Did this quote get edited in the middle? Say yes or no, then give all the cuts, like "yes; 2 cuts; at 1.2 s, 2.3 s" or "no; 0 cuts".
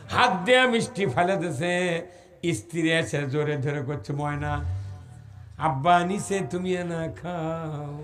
no; 0 cuts